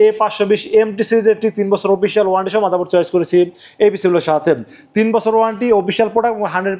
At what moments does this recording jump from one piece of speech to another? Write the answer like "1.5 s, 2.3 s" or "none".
none